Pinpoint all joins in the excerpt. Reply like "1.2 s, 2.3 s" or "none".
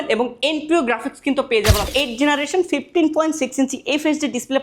1.9 s

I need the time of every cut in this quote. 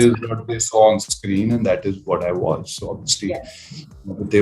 none

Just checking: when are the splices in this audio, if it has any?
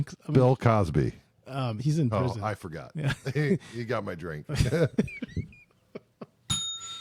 none

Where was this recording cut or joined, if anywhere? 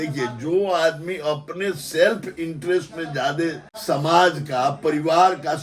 3.7 s

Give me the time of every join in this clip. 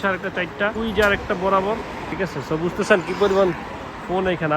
0.8 s, 2.1 s

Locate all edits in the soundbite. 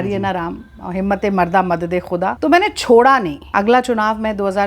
2.4 s, 3.4 s

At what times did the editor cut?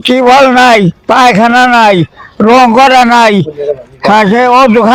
none

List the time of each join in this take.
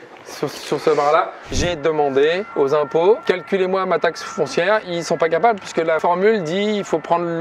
1.6 s, 2.5 s, 3.2 s, 4.9 s, 6.0 s

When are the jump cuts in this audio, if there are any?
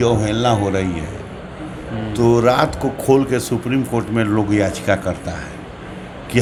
none

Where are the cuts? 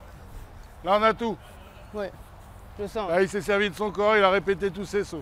none

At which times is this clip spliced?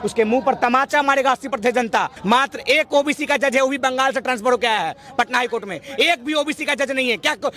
2.1 s

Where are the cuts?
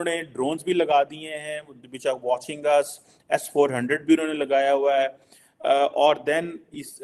none

